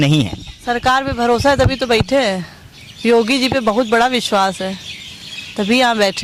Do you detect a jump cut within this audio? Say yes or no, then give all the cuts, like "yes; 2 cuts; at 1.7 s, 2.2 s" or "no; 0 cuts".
no; 0 cuts